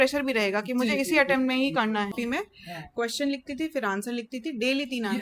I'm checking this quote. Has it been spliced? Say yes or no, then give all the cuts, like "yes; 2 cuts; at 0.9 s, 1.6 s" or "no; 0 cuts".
yes; 1 cut; at 2.2 s